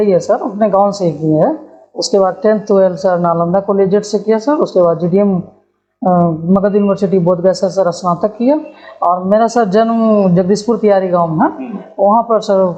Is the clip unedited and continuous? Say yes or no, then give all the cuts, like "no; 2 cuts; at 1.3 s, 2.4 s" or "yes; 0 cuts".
yes; 0 cuts